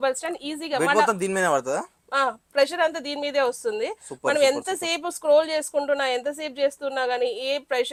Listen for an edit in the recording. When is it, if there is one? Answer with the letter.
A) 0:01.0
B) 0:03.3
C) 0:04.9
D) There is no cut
D